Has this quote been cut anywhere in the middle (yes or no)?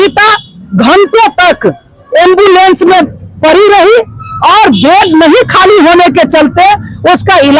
no